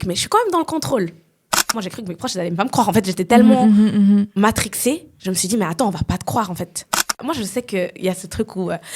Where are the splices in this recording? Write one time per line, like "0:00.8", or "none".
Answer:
0:01.8
0:07.3